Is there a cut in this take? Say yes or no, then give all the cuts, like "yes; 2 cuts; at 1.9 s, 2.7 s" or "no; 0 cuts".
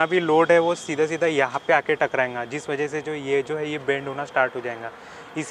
no; 0 cuts